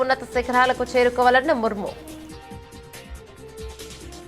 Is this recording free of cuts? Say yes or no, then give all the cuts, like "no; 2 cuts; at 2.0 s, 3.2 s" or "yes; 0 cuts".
no; 1 cut; at 1.9 s